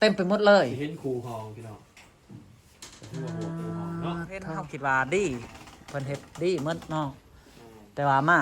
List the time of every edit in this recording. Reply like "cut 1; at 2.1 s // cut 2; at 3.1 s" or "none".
cut 1; at 4.7 s